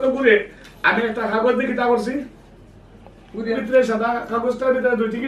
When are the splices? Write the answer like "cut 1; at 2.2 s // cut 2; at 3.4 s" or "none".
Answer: cut 1; at 3.6 s